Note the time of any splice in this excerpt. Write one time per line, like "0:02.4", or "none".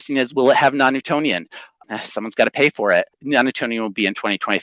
0:01.8
0:03.2

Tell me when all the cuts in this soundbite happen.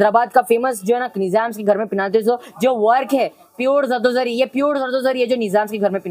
none

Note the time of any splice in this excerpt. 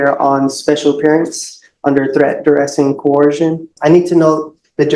0:03.7

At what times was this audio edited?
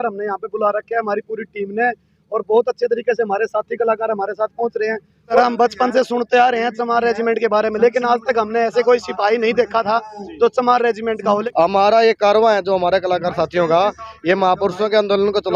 0:05.4
0:11.4

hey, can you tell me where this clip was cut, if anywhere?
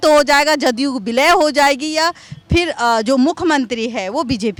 none

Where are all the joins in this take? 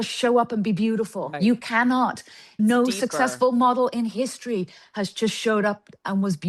0:01.3
0:02.5

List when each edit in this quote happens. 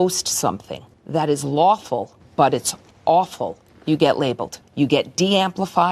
0:04.6

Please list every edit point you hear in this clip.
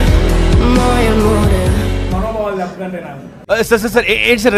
0:02.1

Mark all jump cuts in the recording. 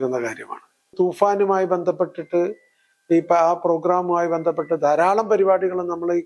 0:00.9

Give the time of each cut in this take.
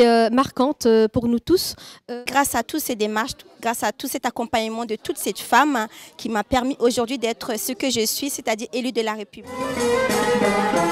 0:01.7
0:09.5

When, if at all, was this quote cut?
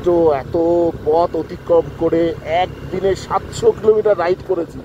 none

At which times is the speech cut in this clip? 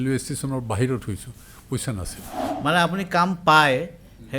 0:02.5

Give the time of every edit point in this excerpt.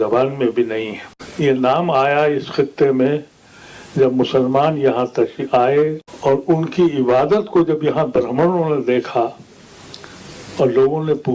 0:01.2
0:06.1

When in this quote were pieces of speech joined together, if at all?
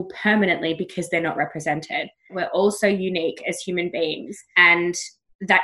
0:02.4

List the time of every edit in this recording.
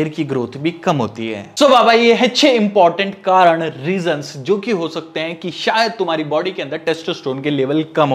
none

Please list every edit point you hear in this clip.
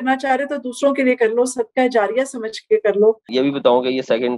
0:03.3

